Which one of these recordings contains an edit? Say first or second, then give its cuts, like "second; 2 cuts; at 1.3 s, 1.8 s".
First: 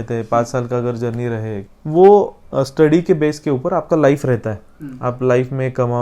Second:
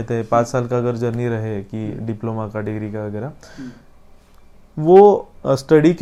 first; 1 cut; at 1.7 s